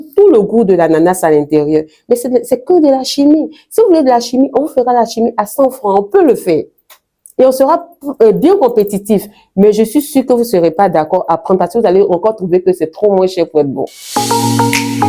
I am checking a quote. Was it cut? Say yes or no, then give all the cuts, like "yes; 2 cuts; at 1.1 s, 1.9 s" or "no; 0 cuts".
yes; 1 cut; at 13.9 s